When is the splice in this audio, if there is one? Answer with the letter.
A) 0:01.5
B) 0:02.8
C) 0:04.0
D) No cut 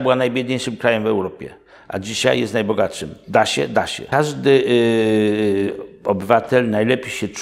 C